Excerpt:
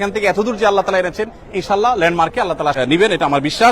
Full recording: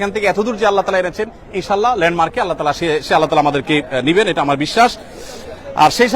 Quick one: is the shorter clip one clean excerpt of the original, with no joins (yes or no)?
no